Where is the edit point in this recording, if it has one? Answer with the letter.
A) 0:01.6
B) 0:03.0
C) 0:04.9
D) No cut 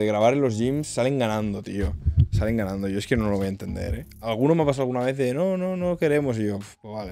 D